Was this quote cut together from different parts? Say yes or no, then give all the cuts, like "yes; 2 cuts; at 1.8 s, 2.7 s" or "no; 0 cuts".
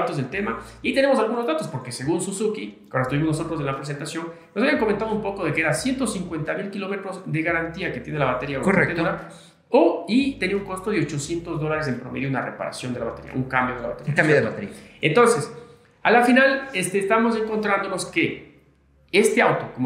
no; 0 cuts